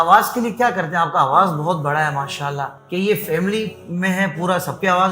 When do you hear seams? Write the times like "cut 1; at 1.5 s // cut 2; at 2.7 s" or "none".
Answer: cut 1; at 2.8 s